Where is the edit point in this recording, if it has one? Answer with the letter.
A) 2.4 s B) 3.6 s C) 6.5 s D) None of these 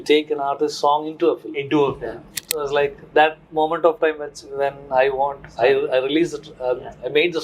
A